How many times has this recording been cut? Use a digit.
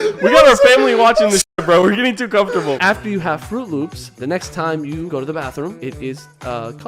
3